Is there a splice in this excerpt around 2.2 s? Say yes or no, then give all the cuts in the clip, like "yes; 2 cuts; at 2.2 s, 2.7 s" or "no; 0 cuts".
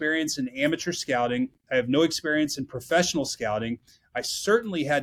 no; 0 cuts